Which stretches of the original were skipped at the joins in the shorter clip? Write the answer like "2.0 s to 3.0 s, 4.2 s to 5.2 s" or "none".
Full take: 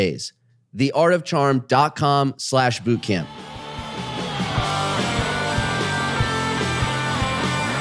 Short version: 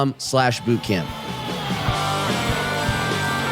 3.3 s to 3.8 s